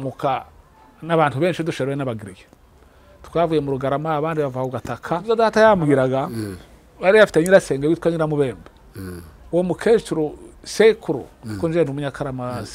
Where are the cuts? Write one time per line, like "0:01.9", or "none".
0:05.2